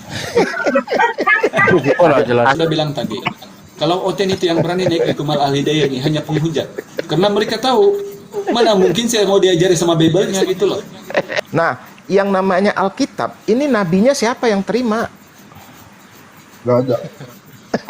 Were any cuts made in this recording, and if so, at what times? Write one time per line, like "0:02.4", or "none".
0:02.6
0:11.4